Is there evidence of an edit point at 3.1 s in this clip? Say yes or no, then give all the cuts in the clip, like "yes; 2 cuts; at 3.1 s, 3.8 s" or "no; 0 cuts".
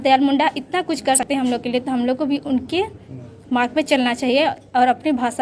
no; 1 cut; at 1.2 s